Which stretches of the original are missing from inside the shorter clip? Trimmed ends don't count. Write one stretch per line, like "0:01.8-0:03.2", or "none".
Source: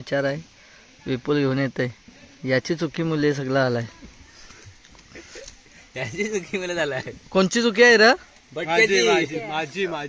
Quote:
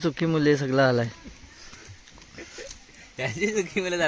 none